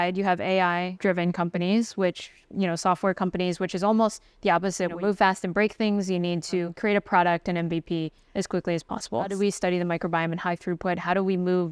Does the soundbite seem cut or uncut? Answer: cut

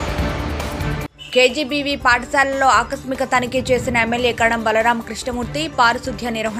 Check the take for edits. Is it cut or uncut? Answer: uncut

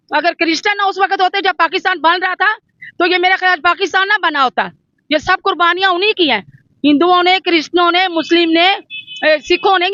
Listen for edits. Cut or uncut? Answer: uncut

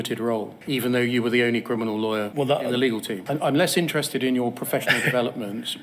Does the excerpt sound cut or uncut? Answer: cut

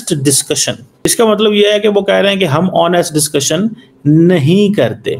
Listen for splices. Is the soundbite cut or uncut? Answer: cut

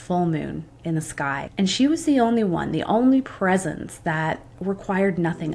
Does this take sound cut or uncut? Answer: cut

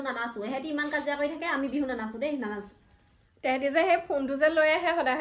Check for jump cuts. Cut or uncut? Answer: uncut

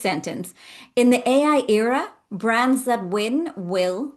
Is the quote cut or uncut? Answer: uncut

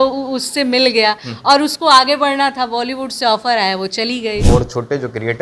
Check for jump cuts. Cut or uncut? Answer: cut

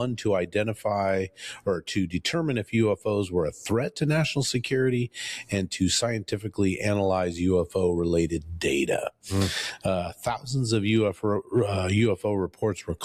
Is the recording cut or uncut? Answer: uncut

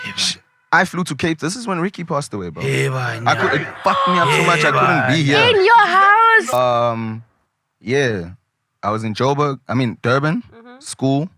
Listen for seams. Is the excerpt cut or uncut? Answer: cut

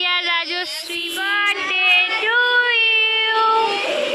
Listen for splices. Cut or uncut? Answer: cut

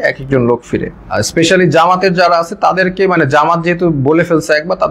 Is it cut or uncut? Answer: cut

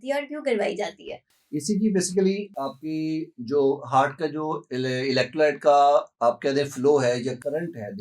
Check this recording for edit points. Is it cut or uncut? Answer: cut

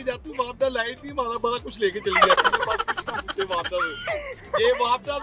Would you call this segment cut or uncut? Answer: uncut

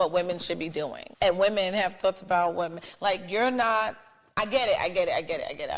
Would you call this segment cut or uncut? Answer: cut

